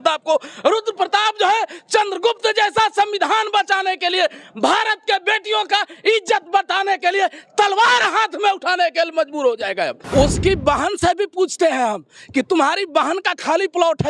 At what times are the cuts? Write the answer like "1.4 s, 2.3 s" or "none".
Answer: 10.0 s